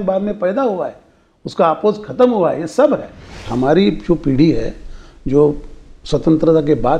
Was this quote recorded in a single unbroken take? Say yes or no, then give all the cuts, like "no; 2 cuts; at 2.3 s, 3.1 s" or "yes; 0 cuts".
no; 1 cut; at 3.4 s